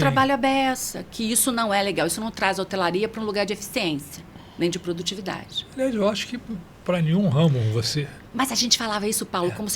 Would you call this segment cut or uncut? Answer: uncut